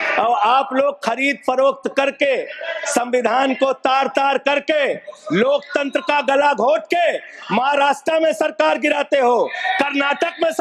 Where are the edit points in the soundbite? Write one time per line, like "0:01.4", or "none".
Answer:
none